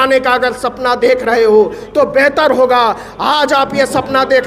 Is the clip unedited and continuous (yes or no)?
yes